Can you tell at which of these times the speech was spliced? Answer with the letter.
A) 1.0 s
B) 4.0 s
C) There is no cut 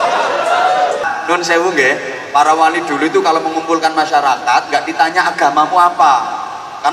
A